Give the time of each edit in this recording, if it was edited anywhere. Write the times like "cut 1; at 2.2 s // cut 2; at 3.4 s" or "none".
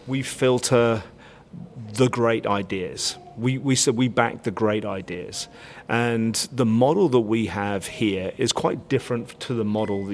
none